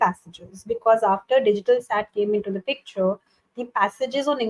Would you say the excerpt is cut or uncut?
uncut